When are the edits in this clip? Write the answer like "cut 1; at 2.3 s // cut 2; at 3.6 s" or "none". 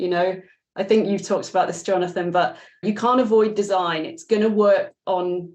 cut 1; at 2.8 s